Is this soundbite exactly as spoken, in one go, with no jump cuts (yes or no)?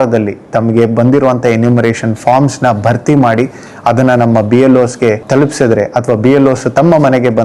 yes